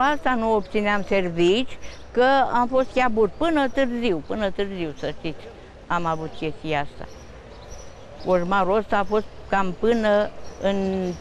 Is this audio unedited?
yes; 0 cuts

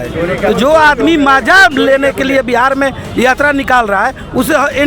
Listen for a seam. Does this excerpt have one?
no; 0 cuts

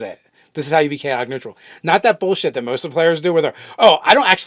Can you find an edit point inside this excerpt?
no; 0 cuts

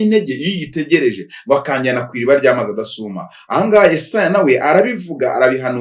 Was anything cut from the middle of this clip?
no; 0 cuts

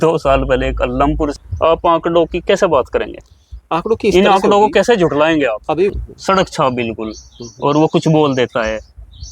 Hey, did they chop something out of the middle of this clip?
yes; 2 cuts; at 1.3 s, 5.9 s

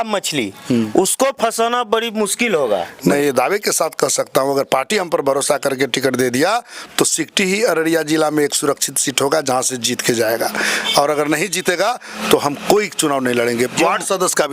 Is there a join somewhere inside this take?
yes; 1 cut; at 3.1 s

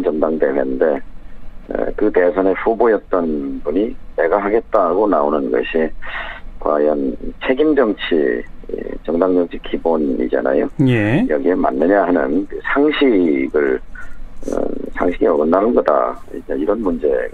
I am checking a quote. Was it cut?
no; 0 cuts

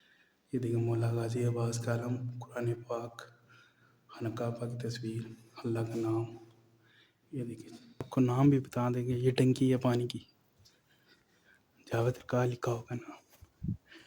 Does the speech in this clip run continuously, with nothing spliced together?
no; 1 cut; at 8.1 s

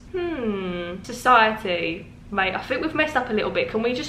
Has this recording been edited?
yes; 1 cut; at 1.0 s

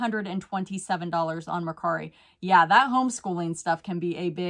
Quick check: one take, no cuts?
yes; 0 cuts

